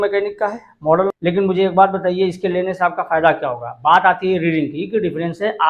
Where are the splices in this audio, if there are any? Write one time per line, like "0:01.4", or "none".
0:01.1

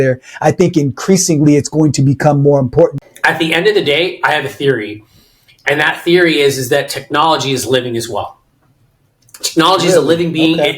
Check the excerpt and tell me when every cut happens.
0:03.0

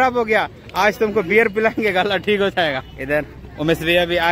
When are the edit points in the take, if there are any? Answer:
0:02.9

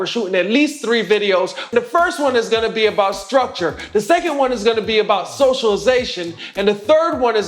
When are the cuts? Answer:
0:01.6

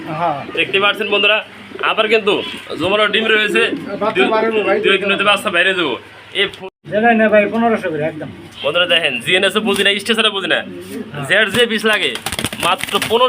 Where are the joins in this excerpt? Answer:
0:06.5

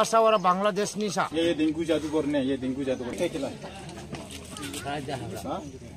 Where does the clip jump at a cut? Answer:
0:01.4

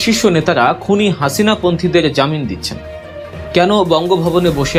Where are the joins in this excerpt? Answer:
none

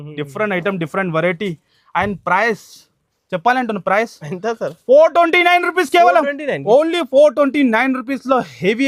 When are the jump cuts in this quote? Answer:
none

